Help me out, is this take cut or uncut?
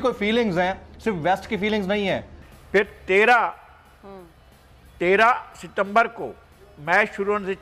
cut